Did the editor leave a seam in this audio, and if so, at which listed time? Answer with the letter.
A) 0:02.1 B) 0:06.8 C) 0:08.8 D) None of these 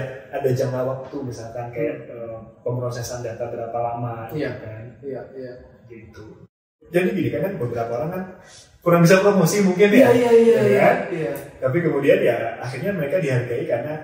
B